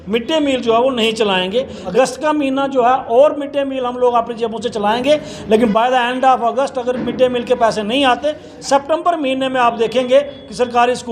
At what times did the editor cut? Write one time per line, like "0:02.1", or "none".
0:01.8